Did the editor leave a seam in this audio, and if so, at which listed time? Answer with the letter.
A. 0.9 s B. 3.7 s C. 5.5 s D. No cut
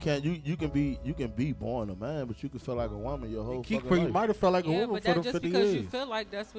D